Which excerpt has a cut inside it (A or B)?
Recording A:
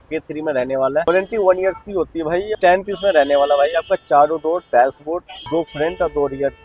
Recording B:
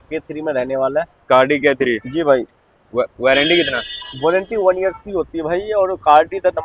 A